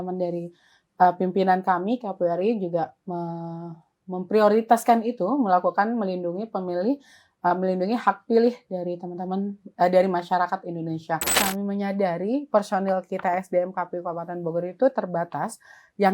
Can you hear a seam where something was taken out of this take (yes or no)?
yes